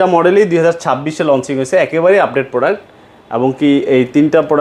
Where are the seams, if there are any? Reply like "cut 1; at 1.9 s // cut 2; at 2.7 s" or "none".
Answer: none